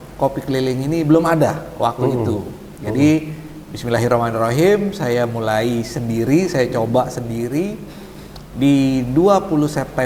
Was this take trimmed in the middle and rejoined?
no; 0 cuts

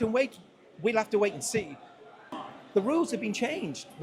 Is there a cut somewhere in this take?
yes; 1 cut; at 2.3 s

